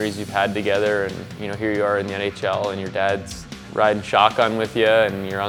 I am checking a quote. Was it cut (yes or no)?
no